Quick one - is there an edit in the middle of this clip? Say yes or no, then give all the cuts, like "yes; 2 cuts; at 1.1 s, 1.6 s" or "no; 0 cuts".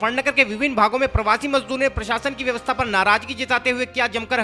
no; 0 cuts